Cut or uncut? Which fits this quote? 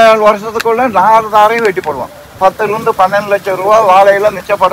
cut